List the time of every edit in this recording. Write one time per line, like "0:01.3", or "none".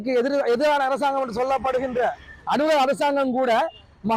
none